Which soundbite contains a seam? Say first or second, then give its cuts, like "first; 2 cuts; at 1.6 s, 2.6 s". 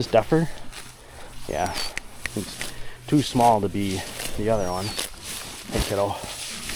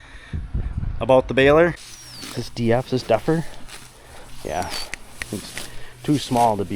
second; 1 cut; at 1.8 s